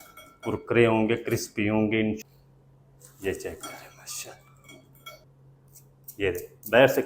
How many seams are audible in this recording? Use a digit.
2